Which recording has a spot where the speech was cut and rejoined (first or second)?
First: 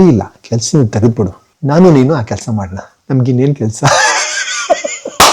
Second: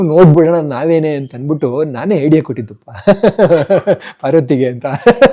first